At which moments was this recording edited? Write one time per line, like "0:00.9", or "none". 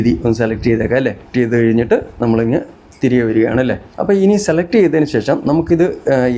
0:01.3
0:03.9